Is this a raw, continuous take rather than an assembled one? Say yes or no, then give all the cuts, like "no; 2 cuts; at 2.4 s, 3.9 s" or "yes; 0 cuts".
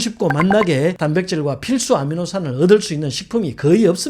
yes; 0 cuts